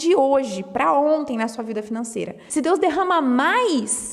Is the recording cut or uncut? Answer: cut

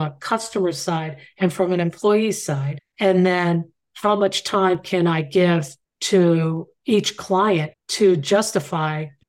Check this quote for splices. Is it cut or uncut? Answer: uncut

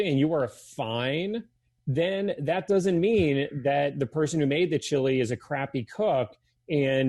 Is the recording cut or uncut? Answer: uncut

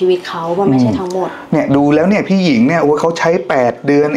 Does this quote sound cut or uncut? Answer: uncut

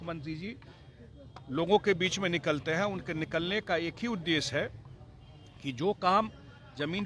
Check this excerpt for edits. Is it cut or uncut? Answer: uncut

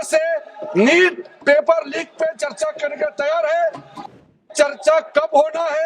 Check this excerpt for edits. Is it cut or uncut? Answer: cut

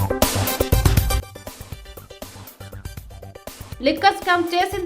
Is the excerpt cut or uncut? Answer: cut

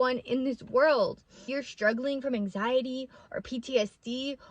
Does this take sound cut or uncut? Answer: cut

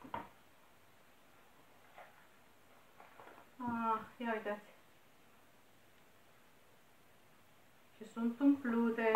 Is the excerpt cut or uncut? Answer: uncut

